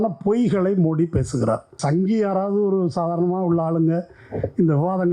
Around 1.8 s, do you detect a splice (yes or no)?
yes